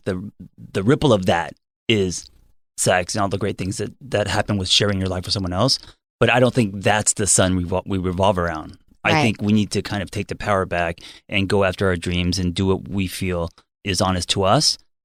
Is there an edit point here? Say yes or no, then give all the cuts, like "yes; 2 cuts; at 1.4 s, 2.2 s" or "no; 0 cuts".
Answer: no; 0 cuts